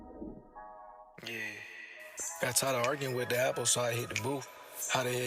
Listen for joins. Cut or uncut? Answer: cut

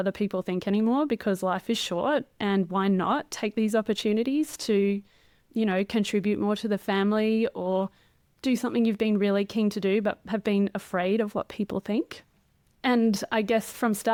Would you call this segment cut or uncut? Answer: uncut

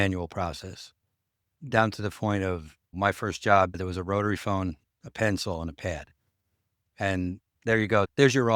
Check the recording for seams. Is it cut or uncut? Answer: cut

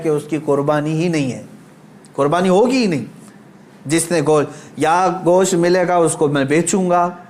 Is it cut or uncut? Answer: uncut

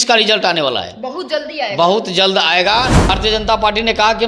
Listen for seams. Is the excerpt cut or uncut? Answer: cut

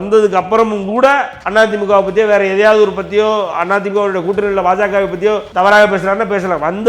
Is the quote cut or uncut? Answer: cut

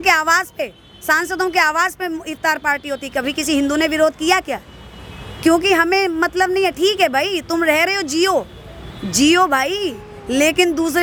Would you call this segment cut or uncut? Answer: uncut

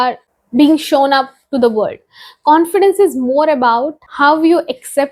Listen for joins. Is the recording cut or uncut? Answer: uncut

